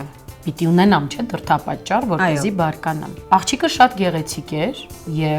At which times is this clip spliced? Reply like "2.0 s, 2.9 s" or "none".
3.1 s